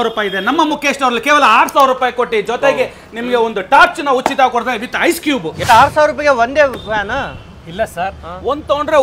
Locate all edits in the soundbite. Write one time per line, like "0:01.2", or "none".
0:05.5